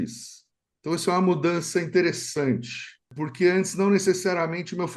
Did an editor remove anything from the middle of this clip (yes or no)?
yes